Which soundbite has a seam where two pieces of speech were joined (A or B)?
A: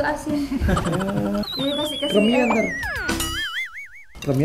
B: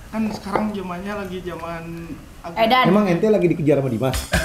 A